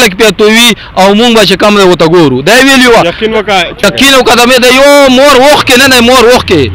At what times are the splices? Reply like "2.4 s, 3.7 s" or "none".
none